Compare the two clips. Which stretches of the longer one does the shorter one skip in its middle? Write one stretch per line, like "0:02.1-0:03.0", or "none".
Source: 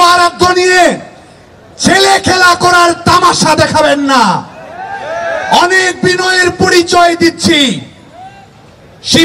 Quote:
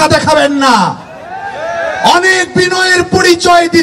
none